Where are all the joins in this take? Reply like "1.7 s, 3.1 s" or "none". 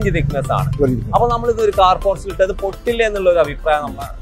none